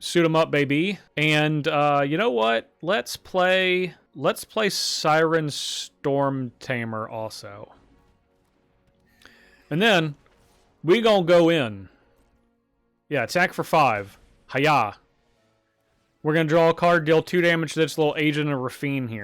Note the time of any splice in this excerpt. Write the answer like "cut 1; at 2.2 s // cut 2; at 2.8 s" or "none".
cut 1; at 1.0 s // cut 2; at 4.0 s